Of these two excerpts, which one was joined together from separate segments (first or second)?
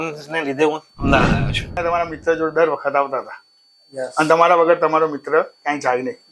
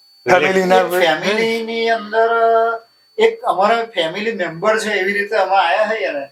first